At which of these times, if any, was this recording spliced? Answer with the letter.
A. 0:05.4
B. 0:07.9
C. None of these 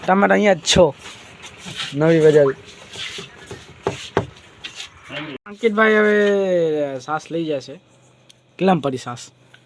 A